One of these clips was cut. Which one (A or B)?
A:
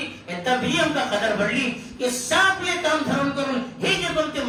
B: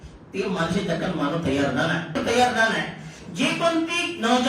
B